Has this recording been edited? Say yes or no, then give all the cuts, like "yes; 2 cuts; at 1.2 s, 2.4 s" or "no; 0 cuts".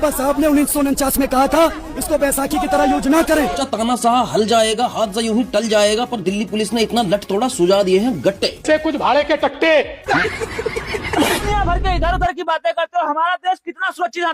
yes; 2 cuts; at 3.6 s, 11.4 s